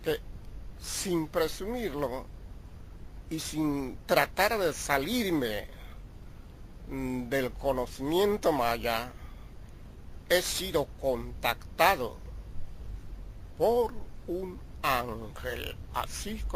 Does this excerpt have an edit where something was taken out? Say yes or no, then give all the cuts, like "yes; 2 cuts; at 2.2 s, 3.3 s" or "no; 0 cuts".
yes; 1 cut; at 6.8 s